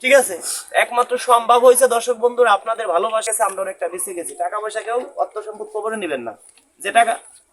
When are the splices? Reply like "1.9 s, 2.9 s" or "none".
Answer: 3.2 s